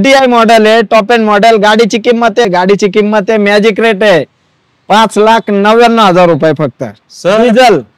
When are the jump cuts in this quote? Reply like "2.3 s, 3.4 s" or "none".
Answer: 2.4 s

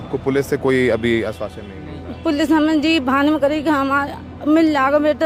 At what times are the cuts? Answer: none

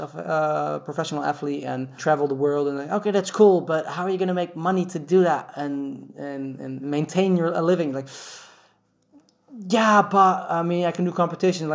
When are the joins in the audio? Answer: 1.9 s

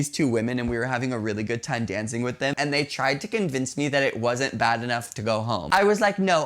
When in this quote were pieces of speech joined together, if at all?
2.5 s, 5.6 s

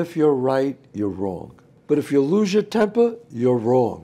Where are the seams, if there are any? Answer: 1.7 s

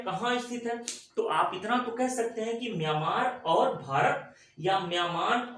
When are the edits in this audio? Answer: none

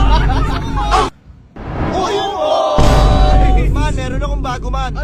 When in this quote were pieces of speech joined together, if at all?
1.2 s

